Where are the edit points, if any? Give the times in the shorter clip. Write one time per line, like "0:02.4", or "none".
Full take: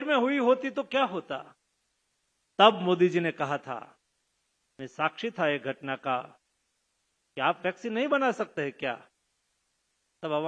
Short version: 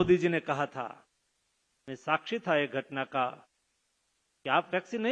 none